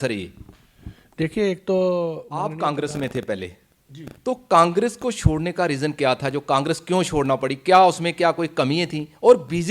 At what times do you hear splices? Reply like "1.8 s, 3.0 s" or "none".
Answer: 2.3 s

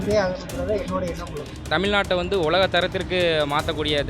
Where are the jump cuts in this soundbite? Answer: 1.6 s

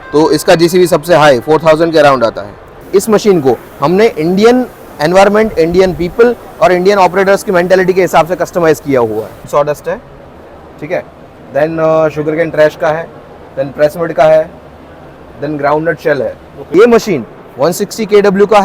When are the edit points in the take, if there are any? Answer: 2.8 s, 9.5 s, 16.5 s

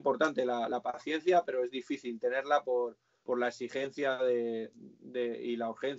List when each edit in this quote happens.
none

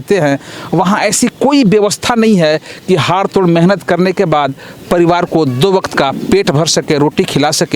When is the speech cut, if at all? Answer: none

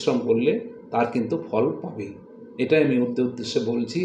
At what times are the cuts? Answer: none

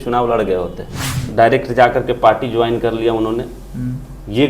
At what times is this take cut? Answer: 1.2 s

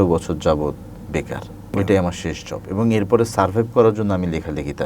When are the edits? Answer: 1.8 s

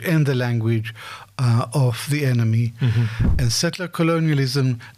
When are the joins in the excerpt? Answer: 3.2 s

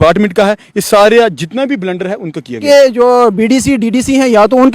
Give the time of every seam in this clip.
2.6 s

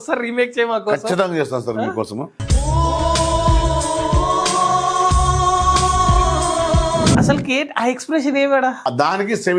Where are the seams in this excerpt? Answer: 7.1 s, 8.8 s

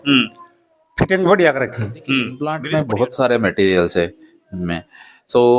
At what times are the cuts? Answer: 2.6 s

